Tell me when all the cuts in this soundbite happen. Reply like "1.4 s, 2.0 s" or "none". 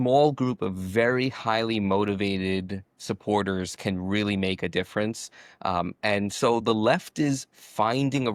none